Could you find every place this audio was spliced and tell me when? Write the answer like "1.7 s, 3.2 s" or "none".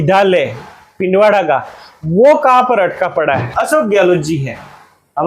3.5 s